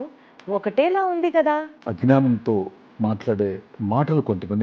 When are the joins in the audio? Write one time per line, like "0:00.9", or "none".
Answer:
0:01.8
0:03.7